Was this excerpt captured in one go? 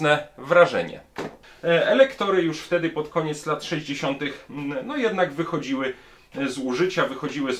no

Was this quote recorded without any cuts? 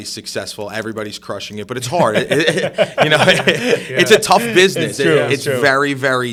yes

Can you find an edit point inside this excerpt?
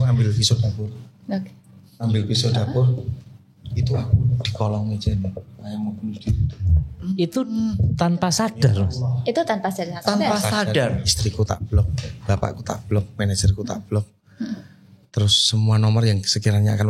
no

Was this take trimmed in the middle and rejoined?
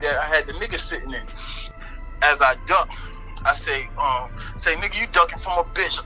yes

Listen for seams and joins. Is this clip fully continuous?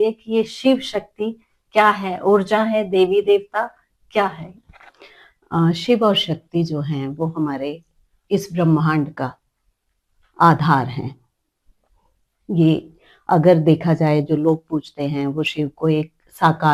yes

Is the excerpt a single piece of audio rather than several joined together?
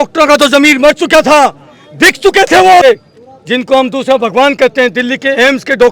no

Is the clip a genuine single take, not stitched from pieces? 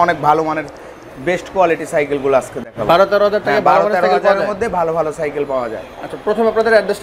yes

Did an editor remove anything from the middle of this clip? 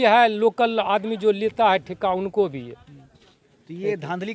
no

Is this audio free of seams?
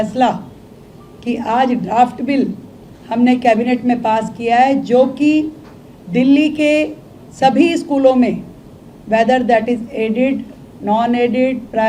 yes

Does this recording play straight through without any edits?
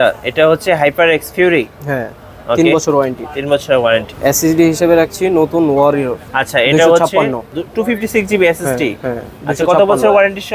yes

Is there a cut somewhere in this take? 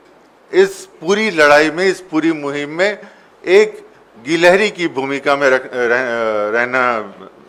no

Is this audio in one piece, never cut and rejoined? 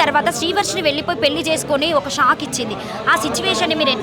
yes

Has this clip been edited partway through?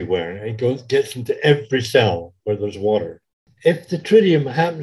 yes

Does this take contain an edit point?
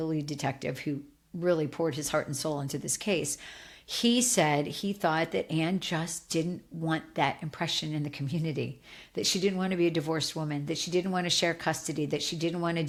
no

